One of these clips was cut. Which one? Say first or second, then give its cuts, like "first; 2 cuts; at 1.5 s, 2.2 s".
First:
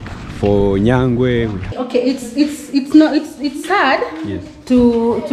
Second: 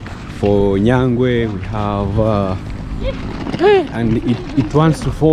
first; 1 cut; at 1.7 s